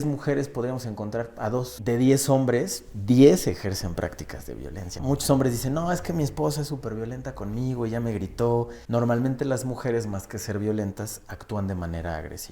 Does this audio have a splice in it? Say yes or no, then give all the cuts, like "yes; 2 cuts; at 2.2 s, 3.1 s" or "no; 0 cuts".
yes; 3 cuts; at 1.8 s, 4.9 s, 8.8 s